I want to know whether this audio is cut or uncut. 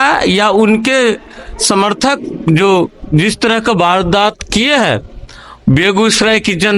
uncut